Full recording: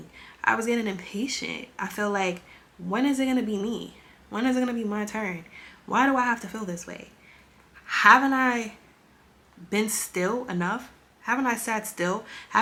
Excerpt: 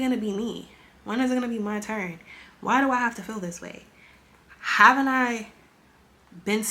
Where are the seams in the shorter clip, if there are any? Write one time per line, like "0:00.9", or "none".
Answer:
none